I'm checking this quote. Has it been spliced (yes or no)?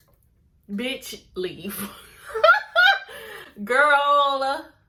no